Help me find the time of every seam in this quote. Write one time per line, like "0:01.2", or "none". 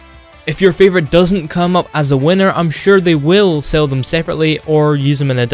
0:01.5